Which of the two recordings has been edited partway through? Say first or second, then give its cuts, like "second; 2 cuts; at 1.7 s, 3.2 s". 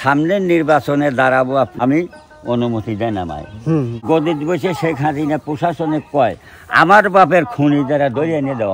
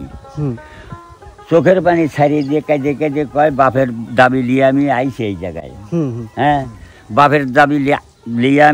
first; 2 cuts; at 1.7 s, 4.0 s